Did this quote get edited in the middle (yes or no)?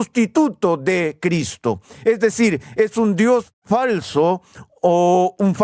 no